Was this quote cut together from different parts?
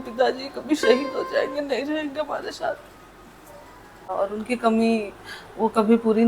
yes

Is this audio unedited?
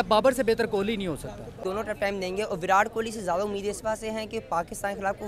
no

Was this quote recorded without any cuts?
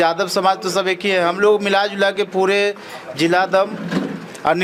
yes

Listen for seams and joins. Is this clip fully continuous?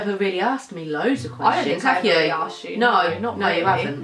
yes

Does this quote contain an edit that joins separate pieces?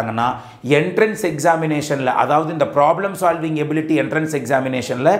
no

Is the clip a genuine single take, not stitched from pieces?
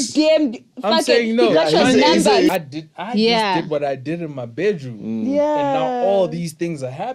no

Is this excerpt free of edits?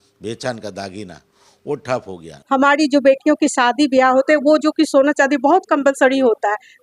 no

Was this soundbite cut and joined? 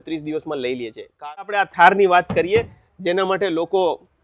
yes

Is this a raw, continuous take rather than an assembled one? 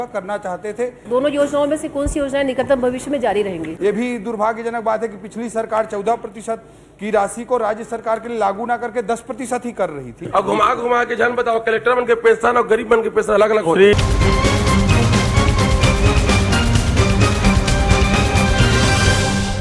no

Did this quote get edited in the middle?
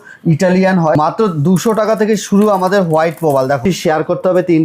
yes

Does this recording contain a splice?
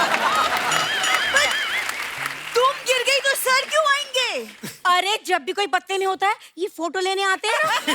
no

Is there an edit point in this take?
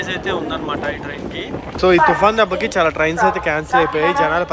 yes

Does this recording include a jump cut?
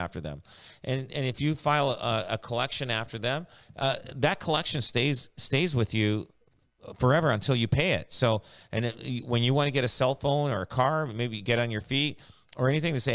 no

